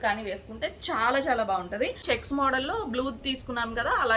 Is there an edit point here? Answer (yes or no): yes